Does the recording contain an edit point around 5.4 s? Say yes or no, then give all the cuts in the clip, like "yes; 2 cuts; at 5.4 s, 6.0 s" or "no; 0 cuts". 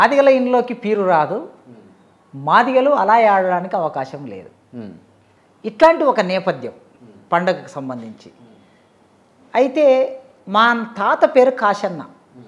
no; 0 cuts